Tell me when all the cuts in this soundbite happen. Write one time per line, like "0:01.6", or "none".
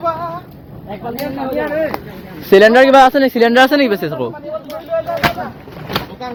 none